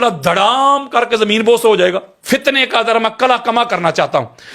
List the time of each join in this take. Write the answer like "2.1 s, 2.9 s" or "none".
2.1 s